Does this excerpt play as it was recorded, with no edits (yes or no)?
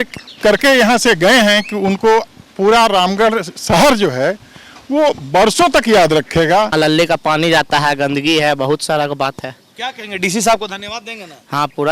no